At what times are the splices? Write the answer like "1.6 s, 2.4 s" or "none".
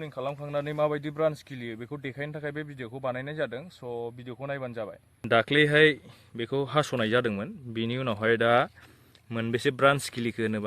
5.1 s